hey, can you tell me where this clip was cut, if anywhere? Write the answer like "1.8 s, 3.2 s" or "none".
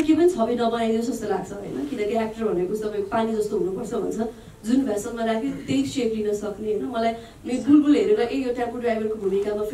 none

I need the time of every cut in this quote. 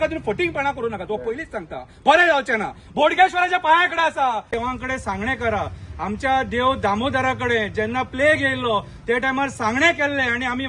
4.5 s

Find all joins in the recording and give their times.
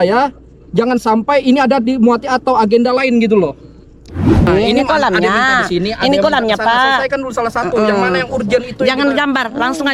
4.5 s

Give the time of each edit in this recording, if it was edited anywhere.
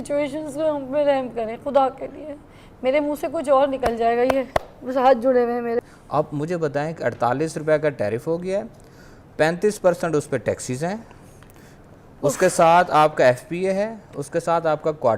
5.8 s

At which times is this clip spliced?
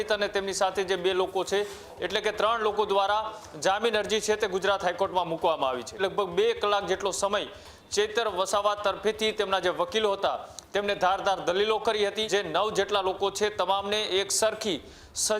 6.0 s, 12.3 s

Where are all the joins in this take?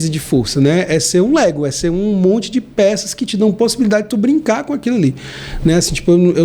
none

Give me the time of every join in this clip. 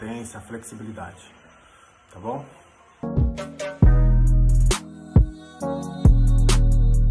3.0 s

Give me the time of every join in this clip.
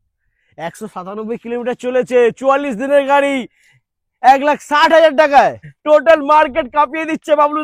5.7 s

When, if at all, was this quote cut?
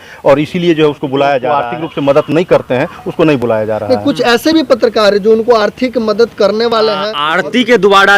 1.6 s, 7.1 s

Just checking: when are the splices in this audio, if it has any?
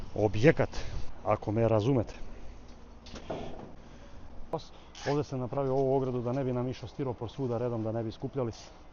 4.5 s

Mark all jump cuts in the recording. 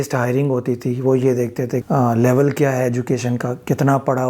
1.8 s

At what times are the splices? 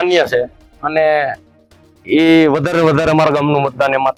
none

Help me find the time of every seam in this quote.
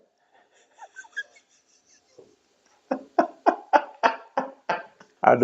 none

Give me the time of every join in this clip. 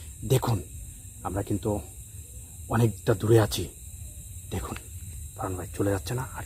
none

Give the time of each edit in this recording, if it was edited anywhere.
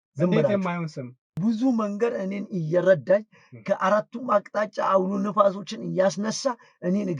1.4 s

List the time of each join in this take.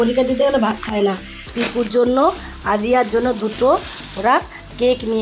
1.4 s

